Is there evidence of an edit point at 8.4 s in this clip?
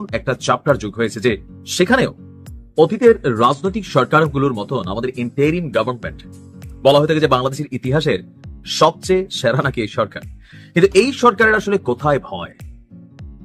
no; 1 cut; at 12.5 s

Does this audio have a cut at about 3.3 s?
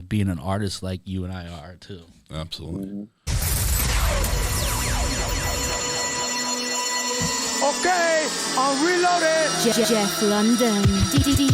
yes; 1 cut; at 3.3 s

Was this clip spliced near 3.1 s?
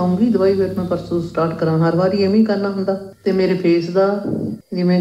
yes; 1 cut; at 3.1 s

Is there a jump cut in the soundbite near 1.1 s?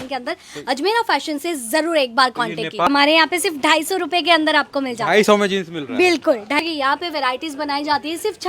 no; 2 cuts; at 2.9 s, 6.6 s

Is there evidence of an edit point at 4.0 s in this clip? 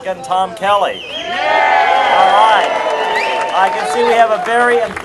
no; 0 cuts

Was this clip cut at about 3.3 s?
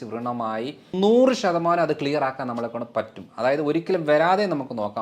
no; 1 cut; at 0.9 s

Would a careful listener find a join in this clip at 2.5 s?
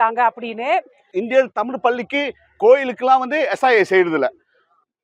no; 1 cut; at 1.0 s

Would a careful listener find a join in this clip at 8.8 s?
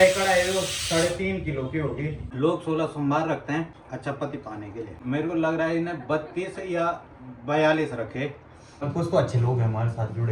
yes; 4 cuts; at 2.2 s, 3.8 s, 5.0 s, 8.8 s

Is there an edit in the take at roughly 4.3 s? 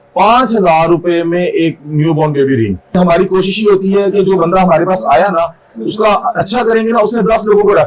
no; 1 cut; at 2.9 s

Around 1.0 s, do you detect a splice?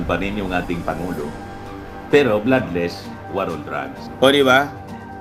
no; 1 cut; at 4.0 s

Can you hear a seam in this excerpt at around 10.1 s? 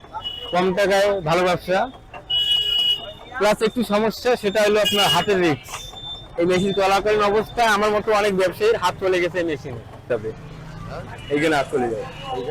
yes; 1 cut; at 10.1 s

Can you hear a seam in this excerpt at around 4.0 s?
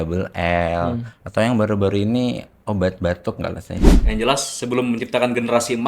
yes; 1 cut; at 4.0 s

